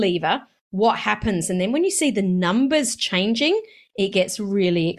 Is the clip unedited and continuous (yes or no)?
yes